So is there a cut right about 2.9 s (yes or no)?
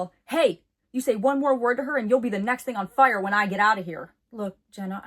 no